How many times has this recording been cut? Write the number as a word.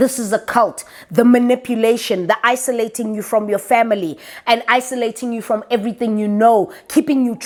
zero